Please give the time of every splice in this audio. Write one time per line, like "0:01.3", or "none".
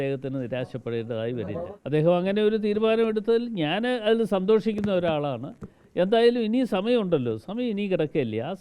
0:01.7